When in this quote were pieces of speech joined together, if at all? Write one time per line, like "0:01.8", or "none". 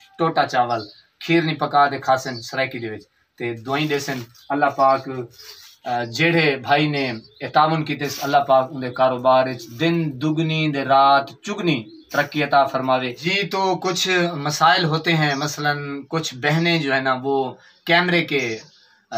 0:13.2